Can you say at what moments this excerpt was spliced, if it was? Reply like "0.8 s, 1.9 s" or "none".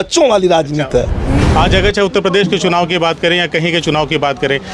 1.3 s